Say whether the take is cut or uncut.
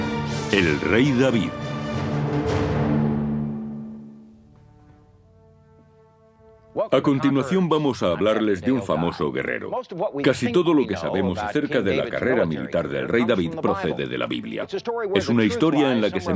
cut